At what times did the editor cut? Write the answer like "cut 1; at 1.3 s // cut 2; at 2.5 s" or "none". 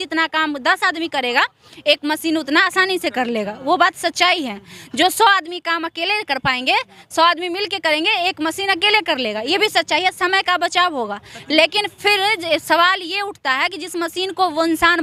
none